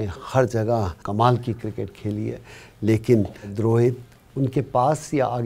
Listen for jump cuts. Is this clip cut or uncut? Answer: cut